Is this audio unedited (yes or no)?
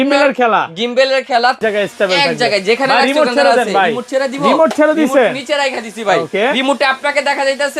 no